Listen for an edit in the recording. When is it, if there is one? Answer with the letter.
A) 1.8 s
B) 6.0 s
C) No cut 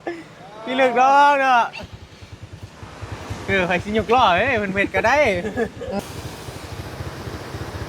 B